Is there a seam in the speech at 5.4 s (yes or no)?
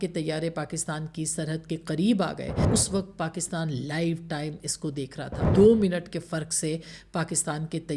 yes